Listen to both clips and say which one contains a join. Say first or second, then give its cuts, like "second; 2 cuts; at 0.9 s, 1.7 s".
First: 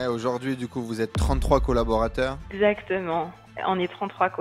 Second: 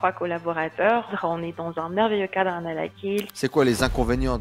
second; 2 cuts; at 1.1 s, 3.4 s